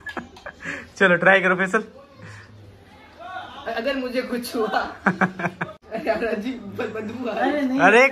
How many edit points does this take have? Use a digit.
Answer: 1